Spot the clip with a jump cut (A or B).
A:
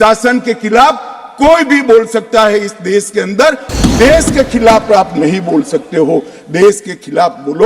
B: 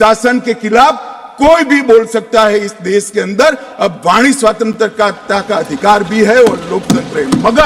A